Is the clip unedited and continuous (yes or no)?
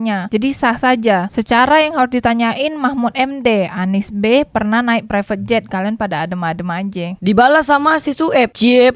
yes